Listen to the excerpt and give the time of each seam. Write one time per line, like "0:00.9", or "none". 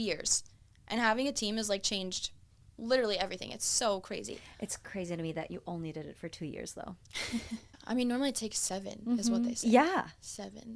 0:07.8